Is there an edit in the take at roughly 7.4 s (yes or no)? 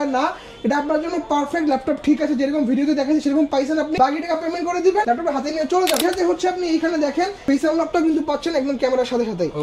yes